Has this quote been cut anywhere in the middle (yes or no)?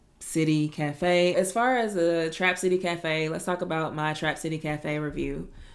yes